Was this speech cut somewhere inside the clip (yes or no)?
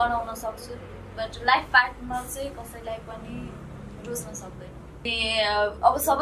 yes